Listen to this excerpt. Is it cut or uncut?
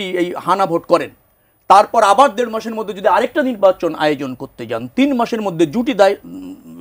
uncut